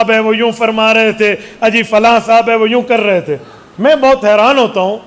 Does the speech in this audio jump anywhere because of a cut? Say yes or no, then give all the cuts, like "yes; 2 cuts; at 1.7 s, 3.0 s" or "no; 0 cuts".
no; 0 cuts